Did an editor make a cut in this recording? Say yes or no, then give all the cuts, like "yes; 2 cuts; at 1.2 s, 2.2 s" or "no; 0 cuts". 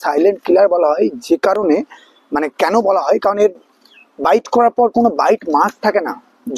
no; 0 cuts